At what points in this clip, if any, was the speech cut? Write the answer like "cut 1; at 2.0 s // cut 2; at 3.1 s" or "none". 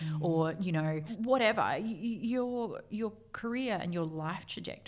cut 1; at 1.1 s